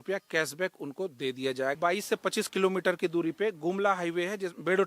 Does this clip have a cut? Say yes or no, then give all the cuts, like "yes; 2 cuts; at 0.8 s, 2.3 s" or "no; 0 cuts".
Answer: yes; 1 cut; at 1.8 s